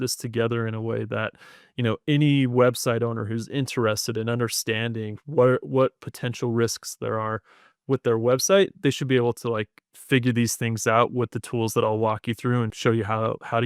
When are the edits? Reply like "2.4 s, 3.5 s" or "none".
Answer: 12.7 s

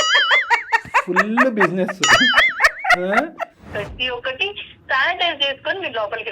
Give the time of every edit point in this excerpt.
3.6 s

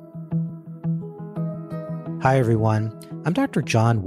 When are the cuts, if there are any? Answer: 2.2 s

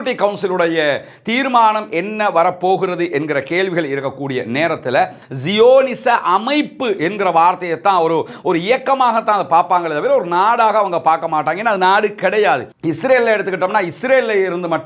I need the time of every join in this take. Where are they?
5.3 s, 12.7 s

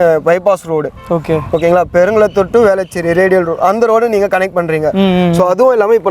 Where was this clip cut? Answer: none

